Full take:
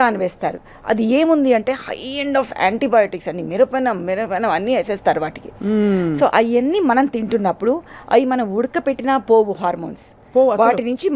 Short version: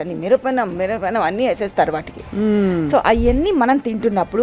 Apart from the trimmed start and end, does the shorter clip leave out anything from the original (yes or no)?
no